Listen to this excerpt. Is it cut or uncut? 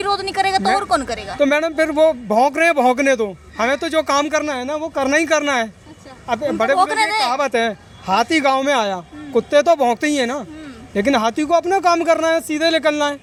uncut